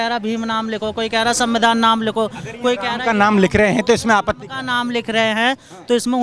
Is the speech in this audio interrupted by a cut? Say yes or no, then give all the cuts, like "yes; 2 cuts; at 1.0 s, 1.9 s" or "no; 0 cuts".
no; 0 cuts